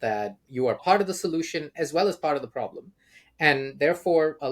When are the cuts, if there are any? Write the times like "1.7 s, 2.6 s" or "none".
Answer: 1.7 s

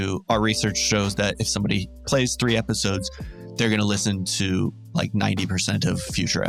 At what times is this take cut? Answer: none

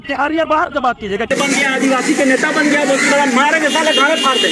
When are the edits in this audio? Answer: 1.3 s

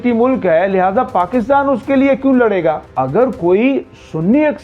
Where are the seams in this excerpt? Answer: 2.9 s

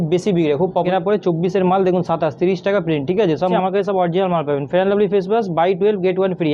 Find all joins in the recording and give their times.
0.9 s, 3.5 s

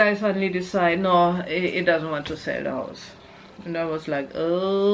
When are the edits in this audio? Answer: none

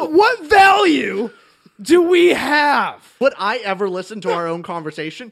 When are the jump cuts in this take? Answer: 3.2 s

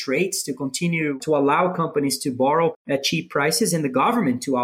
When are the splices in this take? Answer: 1.2 s, 2.8 s

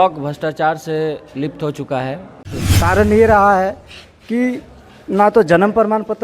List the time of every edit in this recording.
2.6 s

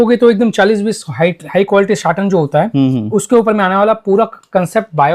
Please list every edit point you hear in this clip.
none

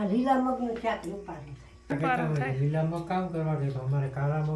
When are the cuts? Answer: 1.9 s

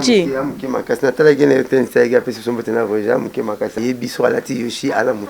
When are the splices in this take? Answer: 3.8 s

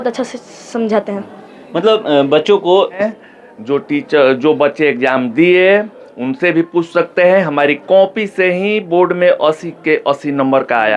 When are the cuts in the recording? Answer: 3.0 s

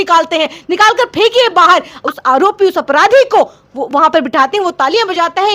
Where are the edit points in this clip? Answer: 2.0 s

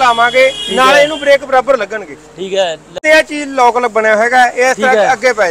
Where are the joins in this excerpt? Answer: 3.0 s

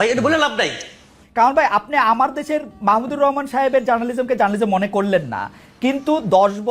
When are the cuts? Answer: 1.2 s

